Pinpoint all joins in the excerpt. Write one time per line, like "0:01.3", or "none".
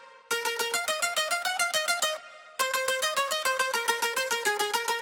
none